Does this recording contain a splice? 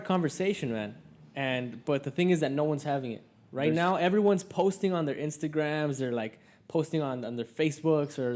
no; 0 cuts

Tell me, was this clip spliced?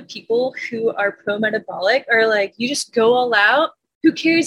no; 0 cuts

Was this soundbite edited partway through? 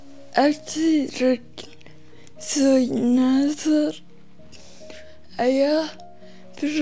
no; 0 cuts

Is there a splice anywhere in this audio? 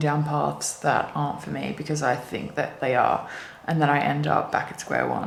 no; 0 cuts

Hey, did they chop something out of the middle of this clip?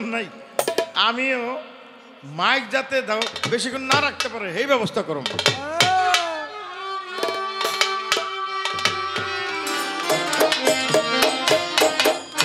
yes; 1 cut; at 9.9 s

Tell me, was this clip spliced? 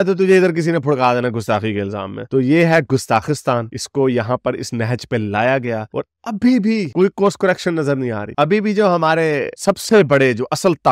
no; 0 cuts

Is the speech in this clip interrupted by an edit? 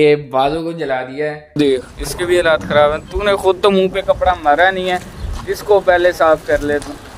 yes; 1 cut; at 1.6 s

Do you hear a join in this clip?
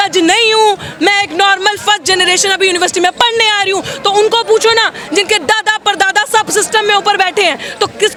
no; 0 cuts

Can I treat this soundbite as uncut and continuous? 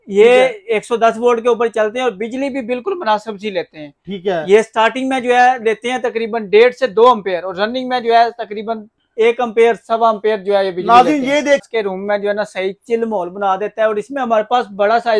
no; 1 cut; at 11.6 s

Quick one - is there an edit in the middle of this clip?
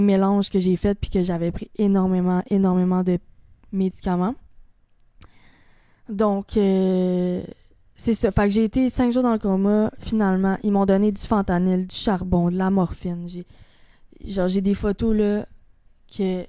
no; 0 cuts

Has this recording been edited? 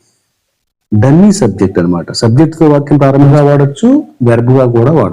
yes; 1 cut; at 3.3 s

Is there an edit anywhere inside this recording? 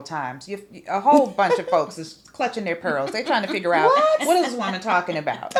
no; 0 cuts

